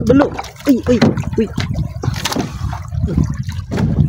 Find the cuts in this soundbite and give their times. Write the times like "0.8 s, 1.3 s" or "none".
none